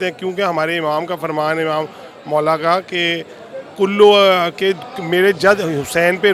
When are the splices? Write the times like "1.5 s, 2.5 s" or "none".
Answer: none